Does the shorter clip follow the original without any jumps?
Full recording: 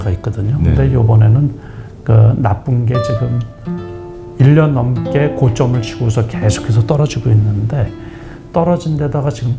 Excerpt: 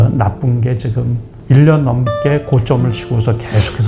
no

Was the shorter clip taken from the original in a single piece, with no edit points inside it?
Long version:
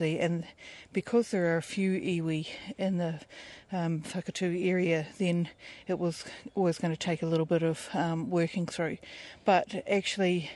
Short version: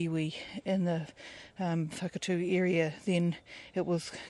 yes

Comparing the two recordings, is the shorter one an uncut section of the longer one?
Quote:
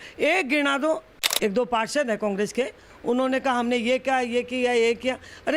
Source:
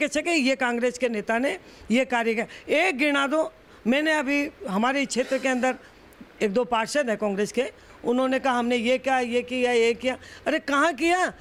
no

